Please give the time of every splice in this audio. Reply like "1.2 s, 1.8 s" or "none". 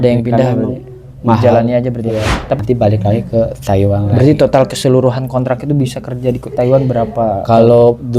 2.6 s